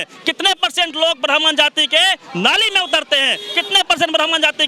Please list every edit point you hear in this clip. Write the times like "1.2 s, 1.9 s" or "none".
none